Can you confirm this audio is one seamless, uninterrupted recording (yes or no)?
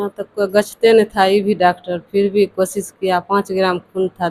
yes